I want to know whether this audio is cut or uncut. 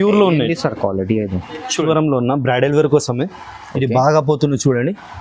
cut